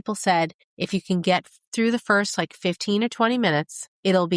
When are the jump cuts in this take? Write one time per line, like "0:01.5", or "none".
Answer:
none